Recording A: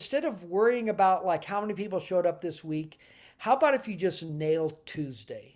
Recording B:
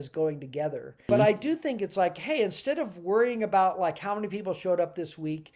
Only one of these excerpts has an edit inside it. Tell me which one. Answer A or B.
B